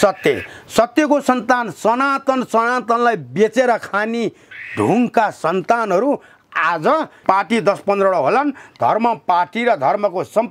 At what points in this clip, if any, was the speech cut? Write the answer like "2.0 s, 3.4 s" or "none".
7.2 s

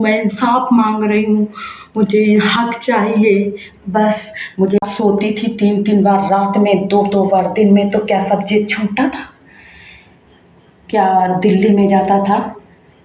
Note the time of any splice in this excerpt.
4.8 s

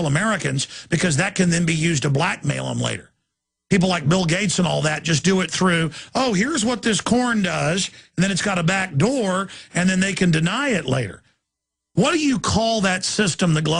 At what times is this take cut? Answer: 7.0 s

